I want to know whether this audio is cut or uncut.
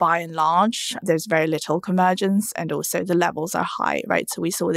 cut